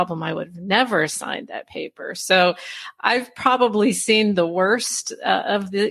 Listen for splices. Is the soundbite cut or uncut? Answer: uncut